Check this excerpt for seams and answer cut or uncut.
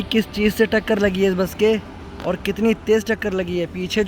uncut